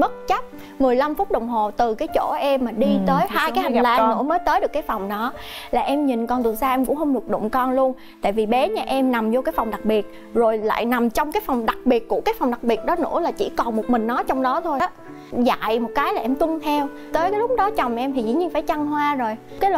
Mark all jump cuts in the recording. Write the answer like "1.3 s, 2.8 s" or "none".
14.8 s

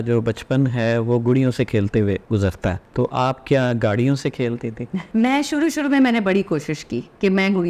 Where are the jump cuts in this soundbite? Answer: 2.4 s, 5.0 s

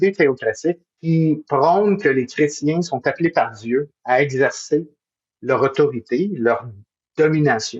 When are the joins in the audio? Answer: 0.9 s

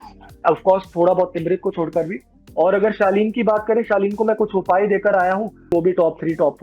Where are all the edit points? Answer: 2.4 s, 5.7 s

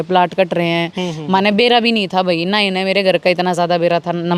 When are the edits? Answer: none

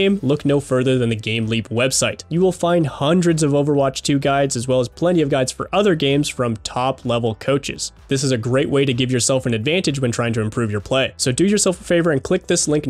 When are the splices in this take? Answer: 2.2 s, 11.2 s

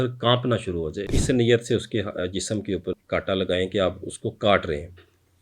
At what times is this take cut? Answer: 1.1 s, 3.0 s

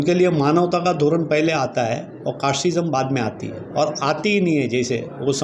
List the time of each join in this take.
none

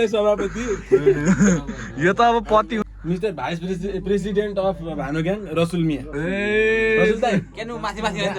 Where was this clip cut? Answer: 3.0 s

